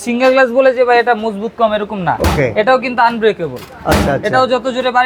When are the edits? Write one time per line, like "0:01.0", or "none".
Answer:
none